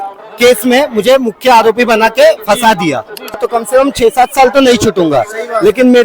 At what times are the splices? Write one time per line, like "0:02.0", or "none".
0:03.4